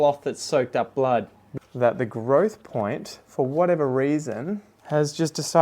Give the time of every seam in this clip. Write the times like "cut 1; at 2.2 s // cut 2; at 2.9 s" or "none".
cut 1; at 1.4 s // cut 2; at 4.7 s